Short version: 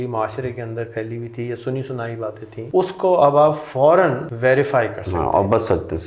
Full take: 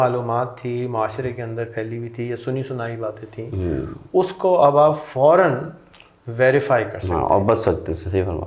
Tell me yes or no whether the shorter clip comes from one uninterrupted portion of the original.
no